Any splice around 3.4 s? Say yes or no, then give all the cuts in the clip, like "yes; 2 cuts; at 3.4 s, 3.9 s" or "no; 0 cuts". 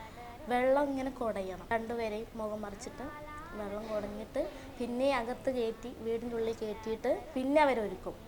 no; 2 cuts; at 1.6 s, 7.3 s